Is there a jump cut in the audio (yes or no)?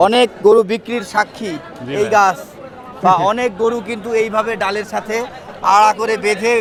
no